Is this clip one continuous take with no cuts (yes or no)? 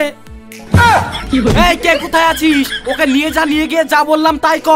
yes